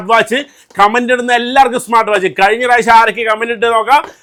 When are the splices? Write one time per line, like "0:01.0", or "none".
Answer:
none